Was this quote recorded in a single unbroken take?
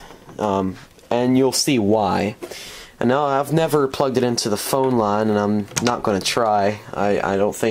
no; 1 cut; at 3.5 s

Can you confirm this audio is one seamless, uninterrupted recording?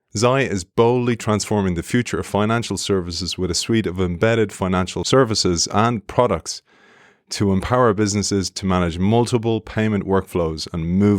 no; 1 cut; at 5.0 s

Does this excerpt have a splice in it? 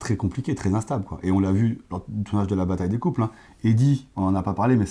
no; 0 cuts

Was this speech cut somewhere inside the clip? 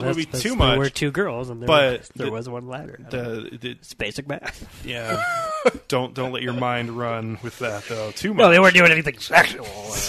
no; 0 cuts

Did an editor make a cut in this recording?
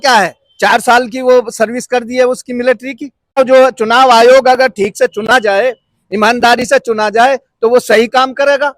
yes; 1 cut; at 3.4 s

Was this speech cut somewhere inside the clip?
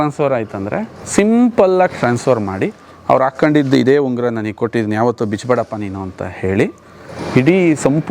yes; 1 cut; at 1.0 s

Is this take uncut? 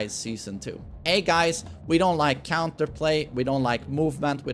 yes; 0 cuts

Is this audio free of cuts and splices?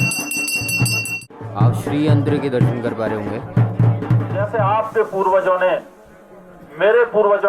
no; 2 cuts; at 1.4 s, 4.3 s

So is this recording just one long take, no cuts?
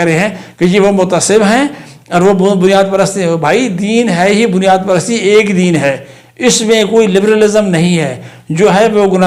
yes; 0 cuts

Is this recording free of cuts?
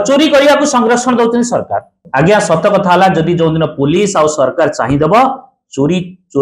no; 1 cut; at 2.0 s

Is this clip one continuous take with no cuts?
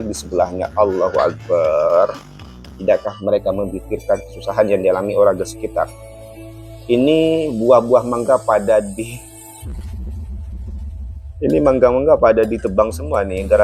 yes; 0 cuts

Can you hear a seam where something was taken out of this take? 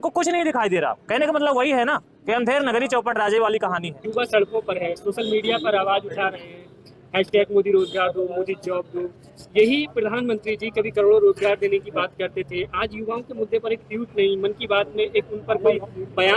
no; 0 cuts

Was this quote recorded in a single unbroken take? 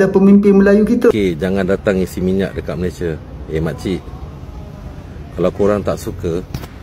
no; 1 cut; at 1.1 s

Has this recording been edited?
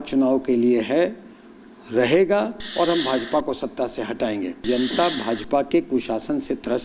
yes; 1 cut; at 4.6 s

